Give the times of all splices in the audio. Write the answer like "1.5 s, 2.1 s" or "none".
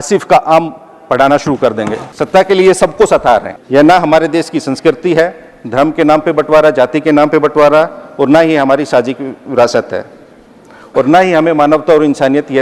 none